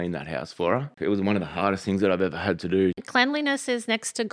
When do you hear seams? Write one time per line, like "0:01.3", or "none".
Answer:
0:00.9
0:03.0